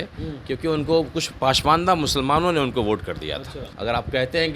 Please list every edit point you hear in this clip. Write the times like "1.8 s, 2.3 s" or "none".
3.7 s